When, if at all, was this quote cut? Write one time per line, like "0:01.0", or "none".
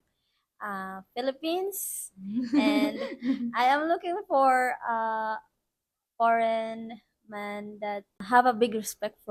0:08.2